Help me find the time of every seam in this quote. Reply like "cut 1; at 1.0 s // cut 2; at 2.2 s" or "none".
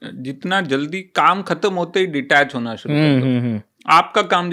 none